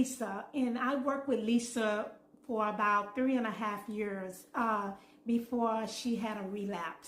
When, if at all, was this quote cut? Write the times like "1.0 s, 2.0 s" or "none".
none